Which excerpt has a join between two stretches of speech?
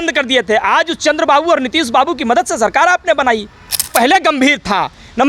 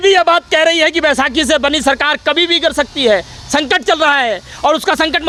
first; 1 cut; at 3.9 s

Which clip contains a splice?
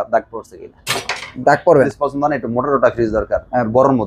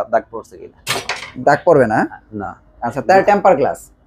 first; 1 cut; at 1.9 s

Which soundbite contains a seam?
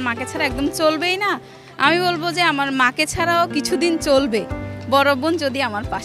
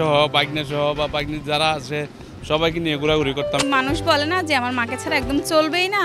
second; 1 cut; at 3.6 s

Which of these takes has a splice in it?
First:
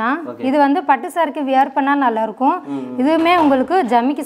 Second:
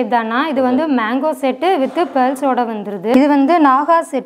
second; 1 cut; at 3.1 s

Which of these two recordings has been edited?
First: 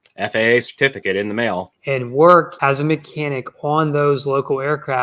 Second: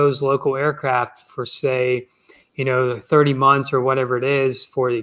first; 2 cuts; at 1.7 s, 2.5 s

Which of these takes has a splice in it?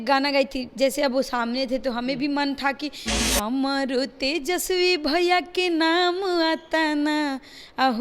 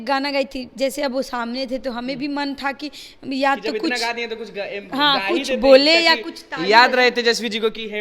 first; 1 cut; at 3.1 s

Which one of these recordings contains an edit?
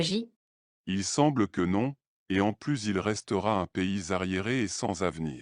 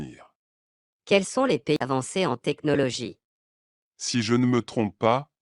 second; 1 cut; at 1.8 s

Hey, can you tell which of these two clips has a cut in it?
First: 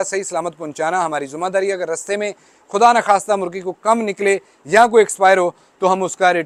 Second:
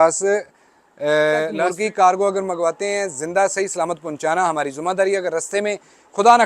second; 1 cut; at 1.5 s

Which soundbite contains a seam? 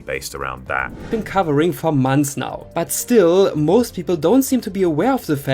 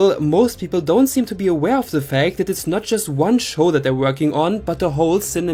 first; 1 cut; at 1.0 s

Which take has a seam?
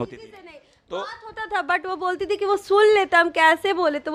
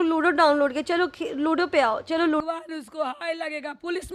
second; 1 cut; at 2.4 s

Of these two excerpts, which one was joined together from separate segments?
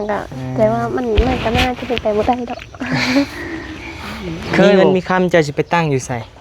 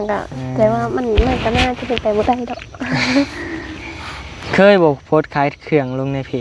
first; 1 cut; at 4.7 s

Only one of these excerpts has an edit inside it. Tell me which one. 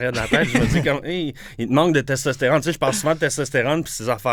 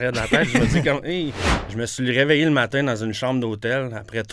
second; 1 cut; at 1.4 s

